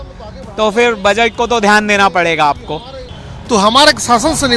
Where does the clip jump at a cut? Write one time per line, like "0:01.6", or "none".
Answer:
0:03.0